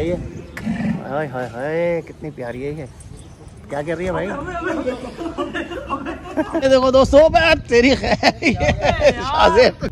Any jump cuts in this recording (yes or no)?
no